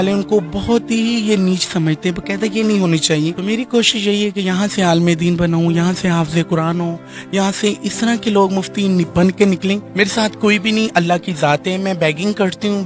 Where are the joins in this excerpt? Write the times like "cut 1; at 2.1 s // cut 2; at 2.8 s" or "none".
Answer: cut 1; at 3.4 s // cut 2; at 9.9 s

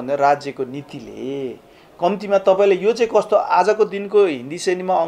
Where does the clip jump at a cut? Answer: none

